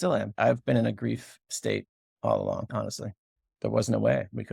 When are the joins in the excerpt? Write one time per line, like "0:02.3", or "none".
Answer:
0:03.4

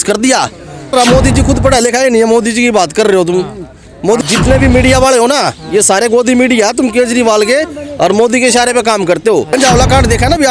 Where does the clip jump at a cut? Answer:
0:00.9
0:04.2
0:09.5

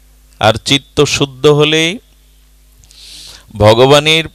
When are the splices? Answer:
none

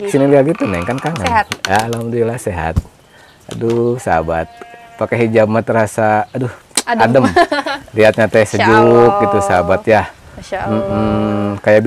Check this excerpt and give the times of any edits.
none

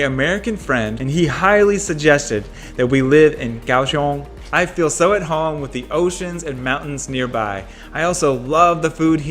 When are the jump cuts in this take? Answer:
0:01.0
0:04.4

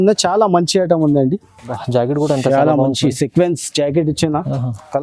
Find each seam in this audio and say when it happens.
0:01.8

